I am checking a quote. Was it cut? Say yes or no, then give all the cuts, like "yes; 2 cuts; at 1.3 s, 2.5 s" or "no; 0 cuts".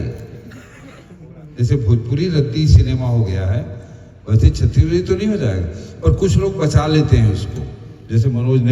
no; 0 cuts